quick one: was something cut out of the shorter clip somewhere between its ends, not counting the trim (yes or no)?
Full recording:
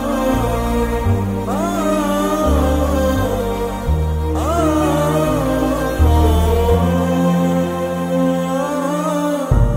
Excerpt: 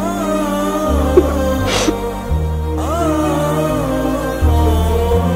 no